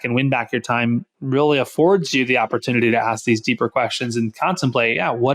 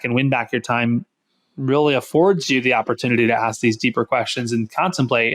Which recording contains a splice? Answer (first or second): first